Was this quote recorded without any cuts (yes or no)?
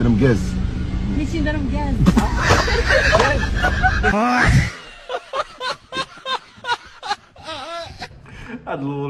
yes